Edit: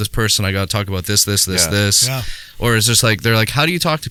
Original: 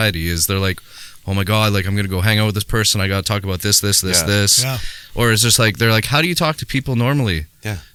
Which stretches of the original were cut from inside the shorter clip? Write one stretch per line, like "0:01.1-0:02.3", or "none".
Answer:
none